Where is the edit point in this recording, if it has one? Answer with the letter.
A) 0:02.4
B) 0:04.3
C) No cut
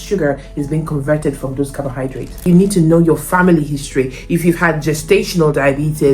A